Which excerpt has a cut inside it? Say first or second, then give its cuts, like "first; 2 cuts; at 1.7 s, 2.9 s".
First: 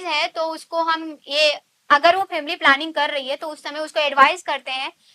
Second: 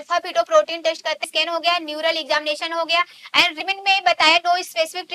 second; 2 cuts; at 1.3 s, 3.6 s